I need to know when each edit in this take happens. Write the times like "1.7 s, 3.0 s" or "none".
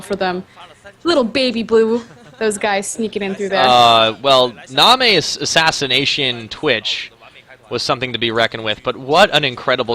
6.9 s